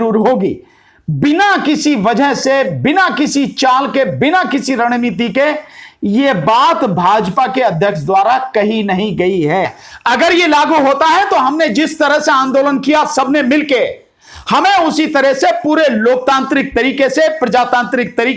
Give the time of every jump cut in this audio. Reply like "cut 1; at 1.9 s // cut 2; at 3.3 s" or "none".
cut 1; at 9.8 s